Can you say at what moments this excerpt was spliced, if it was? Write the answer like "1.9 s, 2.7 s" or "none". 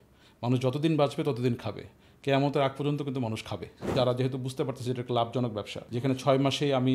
3.8 s, 6.0 s